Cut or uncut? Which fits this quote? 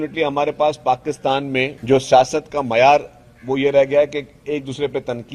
cut